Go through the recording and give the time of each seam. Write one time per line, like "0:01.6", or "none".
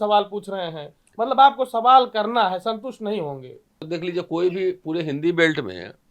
0:03.8